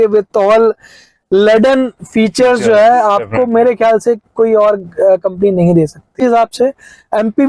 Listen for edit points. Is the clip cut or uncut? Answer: cut